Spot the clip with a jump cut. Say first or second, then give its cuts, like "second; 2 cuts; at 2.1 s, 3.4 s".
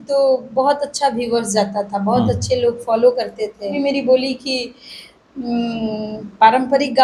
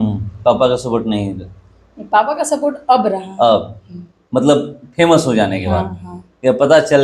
first; 1 cut; at 3.7 s